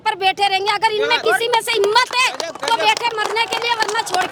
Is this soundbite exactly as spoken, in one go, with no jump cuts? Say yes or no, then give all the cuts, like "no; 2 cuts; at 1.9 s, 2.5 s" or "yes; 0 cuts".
yes; 0 cuts